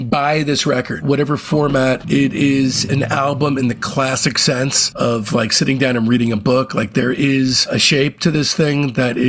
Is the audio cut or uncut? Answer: cut